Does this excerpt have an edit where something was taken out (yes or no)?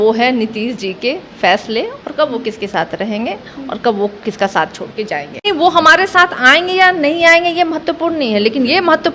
yes